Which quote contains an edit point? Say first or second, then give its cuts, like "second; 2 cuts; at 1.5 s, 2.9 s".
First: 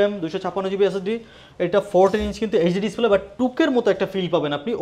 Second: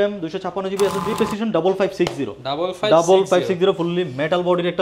second; 1 cut; at 1.2 s